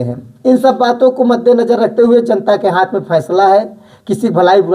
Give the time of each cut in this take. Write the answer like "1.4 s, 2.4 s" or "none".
none